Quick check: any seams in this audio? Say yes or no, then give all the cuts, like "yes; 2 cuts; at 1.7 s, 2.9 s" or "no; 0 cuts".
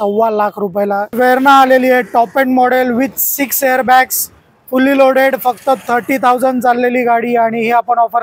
yes; 2 cuts; at 1.1 s, 4.4 s